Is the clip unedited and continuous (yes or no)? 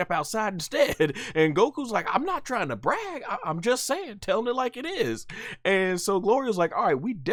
yes